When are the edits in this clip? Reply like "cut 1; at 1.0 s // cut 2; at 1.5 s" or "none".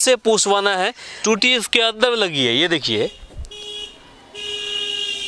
cut 1; at 1.0 s